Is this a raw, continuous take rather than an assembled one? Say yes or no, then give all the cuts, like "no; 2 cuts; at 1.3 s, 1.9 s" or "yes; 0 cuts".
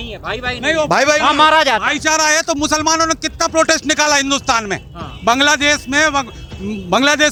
yes; 0 cuts